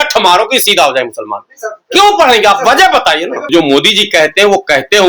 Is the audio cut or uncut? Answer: cut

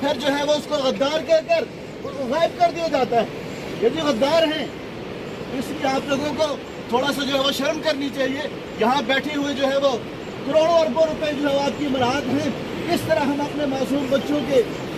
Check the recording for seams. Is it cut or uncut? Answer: uncut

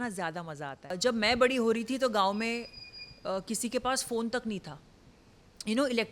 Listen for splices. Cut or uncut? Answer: cut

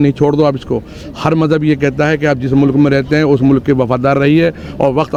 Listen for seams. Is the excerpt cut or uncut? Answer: uncut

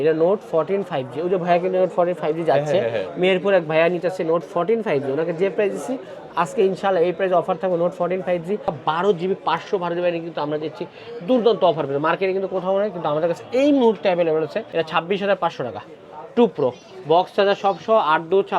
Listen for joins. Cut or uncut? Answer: cut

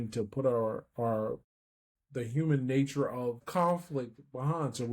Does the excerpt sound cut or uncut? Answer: cut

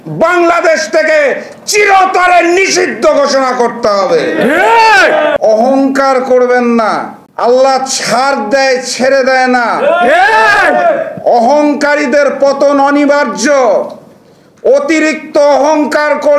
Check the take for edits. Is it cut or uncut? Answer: cut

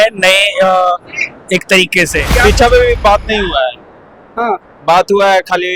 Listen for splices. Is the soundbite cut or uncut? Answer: cut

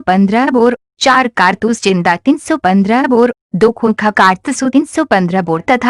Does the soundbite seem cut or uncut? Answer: cut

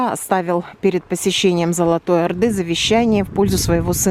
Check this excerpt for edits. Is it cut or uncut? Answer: uncut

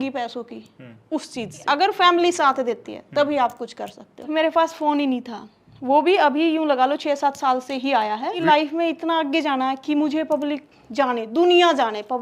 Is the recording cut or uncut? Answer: cut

